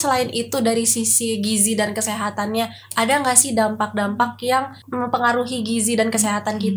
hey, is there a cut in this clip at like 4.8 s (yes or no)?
yes